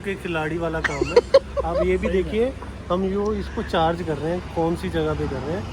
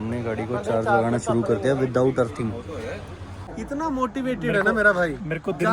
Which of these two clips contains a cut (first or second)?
second